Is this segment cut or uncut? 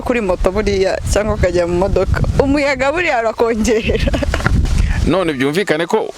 cut